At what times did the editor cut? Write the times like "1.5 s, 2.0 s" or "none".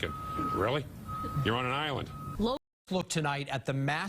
2.6 s